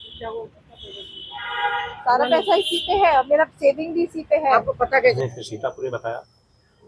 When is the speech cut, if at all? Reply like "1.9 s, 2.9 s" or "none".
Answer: 5.1 s